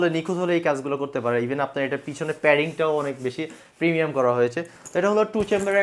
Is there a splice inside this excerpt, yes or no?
no